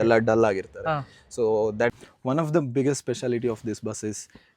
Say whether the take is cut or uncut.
cut